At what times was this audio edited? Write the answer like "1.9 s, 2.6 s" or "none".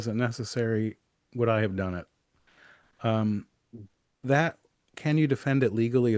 none